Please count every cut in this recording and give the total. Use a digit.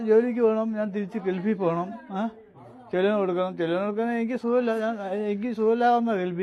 0